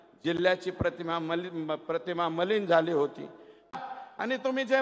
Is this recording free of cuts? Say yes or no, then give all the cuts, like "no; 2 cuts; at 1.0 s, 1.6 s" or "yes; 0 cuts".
no; 1 cut; at 3.8 s